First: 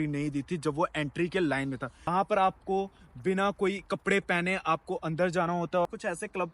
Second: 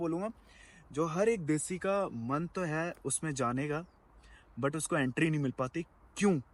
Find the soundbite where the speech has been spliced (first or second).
first